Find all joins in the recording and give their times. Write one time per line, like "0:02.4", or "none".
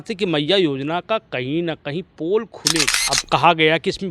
0:03.0